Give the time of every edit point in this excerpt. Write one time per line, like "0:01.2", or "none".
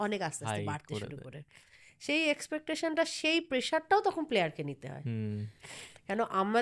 none